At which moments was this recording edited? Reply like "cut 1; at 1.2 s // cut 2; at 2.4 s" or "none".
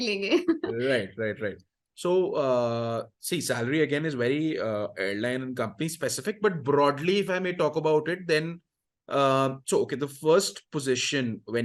none